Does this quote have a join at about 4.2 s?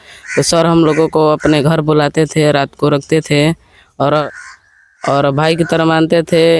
yes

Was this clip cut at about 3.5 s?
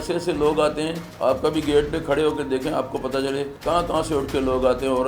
yes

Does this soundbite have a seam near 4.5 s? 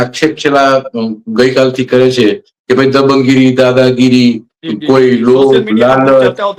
no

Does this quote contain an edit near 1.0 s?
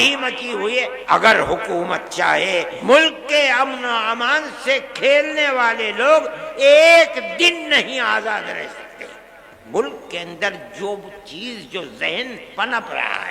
yes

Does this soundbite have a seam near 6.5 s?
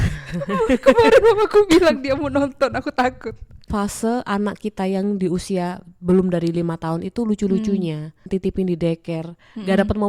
no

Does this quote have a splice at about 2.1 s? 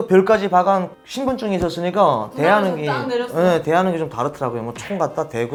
no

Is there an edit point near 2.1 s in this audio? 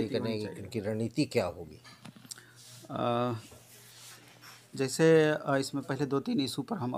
no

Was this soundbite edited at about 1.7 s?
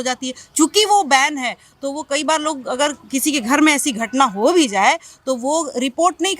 no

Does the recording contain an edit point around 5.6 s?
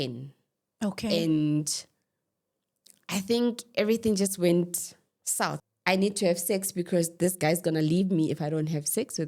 yes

